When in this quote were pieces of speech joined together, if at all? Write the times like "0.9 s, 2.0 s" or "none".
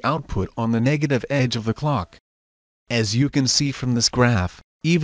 none